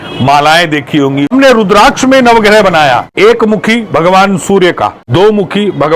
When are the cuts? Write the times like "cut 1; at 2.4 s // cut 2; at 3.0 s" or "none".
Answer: cut 1; at 1.3 s // cut 2; at 3.1 s // cut 3; at 5.0 s